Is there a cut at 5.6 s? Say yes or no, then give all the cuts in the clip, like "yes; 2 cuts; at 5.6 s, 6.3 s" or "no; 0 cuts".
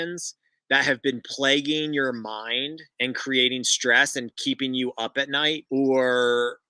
yes; 1 cut; at 5.6 s